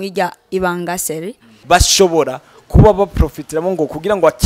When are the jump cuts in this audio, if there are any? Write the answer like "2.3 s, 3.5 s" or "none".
1.5 s